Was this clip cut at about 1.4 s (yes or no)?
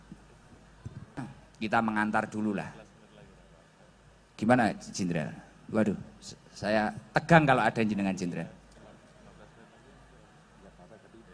yes